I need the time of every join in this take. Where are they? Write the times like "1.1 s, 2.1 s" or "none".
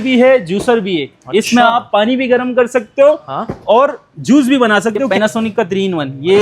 5.1 s